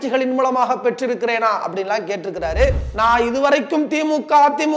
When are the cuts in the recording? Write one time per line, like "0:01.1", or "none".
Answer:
0:02.9